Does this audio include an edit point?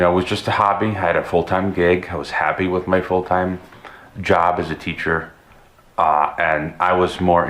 no; 0 cuts

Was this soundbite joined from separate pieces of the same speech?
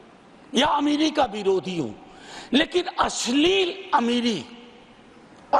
no; 0 cuts

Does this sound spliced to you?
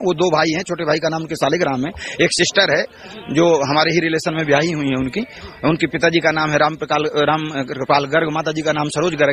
no; 0 cuts

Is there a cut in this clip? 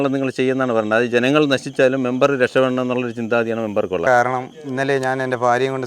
yes; 1 cut; at 4.1 s

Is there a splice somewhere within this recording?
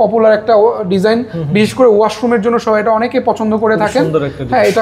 no; 0 cuts

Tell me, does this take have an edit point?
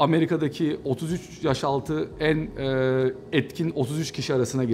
no; 0 cuts

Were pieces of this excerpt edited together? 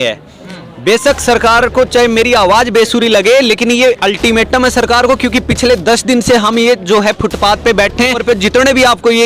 yes; 1 cut; at 8.2 s

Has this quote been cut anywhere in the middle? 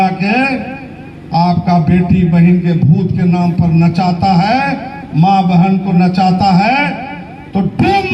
no; 0 cuts

